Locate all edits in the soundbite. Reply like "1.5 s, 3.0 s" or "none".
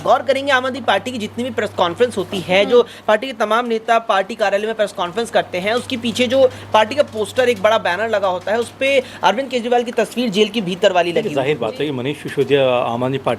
11.3 s